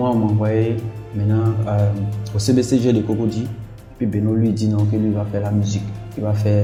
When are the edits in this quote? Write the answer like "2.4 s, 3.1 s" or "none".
none